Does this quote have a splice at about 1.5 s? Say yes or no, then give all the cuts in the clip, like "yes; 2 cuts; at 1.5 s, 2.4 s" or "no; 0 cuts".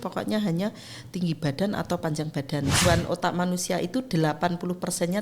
no; 1 cut; at 2.8 s